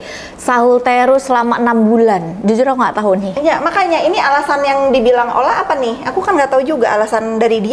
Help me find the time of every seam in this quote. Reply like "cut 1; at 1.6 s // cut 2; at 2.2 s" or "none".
none